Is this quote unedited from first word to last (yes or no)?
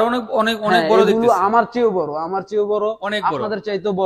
yes